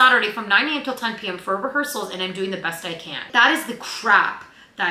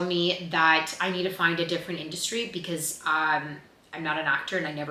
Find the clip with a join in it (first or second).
first